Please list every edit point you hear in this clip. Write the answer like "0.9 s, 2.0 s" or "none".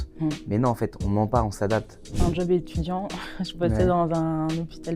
2.0 s